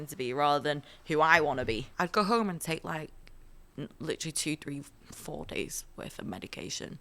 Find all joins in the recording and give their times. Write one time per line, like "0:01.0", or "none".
0:01.9